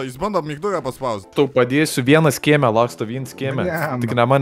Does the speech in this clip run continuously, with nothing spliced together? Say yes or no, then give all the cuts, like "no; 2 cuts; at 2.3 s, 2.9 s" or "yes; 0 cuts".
no; 1 cut; at 1.2 s